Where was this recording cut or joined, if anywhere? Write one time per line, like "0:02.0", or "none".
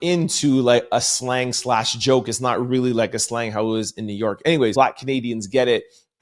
0:04.7